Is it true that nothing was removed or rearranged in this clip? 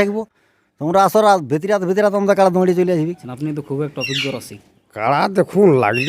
no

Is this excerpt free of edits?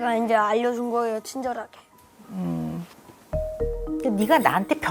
yes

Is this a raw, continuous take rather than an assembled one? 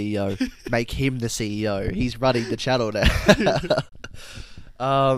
yes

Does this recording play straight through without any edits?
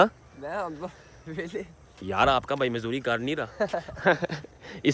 no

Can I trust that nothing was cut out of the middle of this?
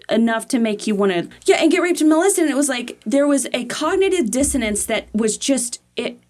no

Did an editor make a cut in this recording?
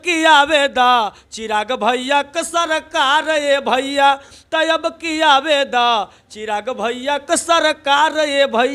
no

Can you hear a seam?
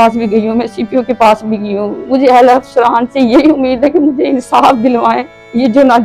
no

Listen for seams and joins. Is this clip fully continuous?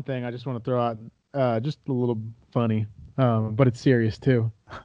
yes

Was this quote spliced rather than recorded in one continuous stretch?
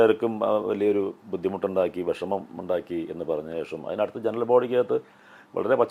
no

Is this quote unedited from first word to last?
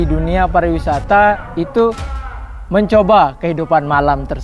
yes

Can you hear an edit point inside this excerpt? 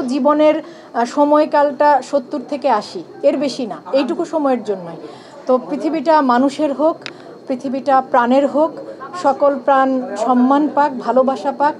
no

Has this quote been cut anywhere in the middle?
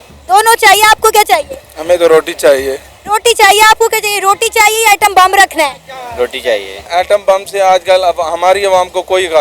yes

